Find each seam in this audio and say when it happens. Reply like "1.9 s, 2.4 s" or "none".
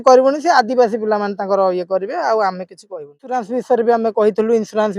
3.2 s